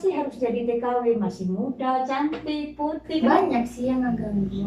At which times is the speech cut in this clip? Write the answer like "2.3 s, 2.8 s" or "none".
3.2 s